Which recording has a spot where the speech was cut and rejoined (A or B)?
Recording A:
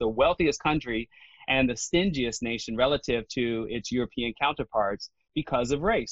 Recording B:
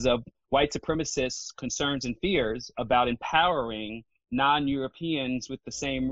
A